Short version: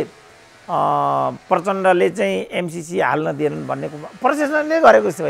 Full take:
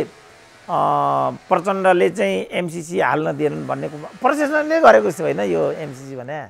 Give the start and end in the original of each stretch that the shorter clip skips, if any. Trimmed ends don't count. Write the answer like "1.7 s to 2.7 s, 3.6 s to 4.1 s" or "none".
none